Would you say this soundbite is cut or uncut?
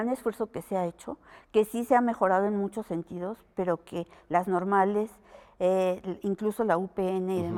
uncut